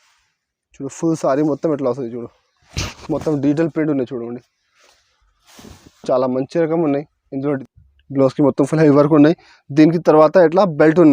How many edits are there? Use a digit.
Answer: 1